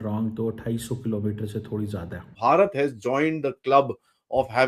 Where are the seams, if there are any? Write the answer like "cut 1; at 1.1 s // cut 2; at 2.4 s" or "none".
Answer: cut 1; at 2.3 s